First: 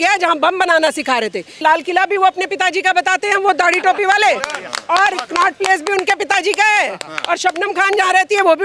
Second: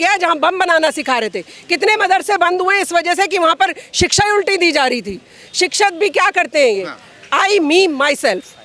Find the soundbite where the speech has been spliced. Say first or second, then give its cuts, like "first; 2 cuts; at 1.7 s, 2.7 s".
first; 1 cut; at 1.6 s